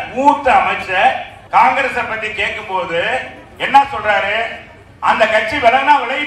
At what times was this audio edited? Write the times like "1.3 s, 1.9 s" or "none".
1.3 s